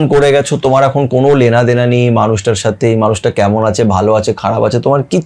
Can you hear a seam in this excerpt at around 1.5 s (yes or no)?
no